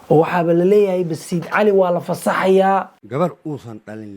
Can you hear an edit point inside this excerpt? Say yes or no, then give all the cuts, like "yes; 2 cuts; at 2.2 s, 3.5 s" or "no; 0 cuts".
yes; 1 cut; at 3.0 s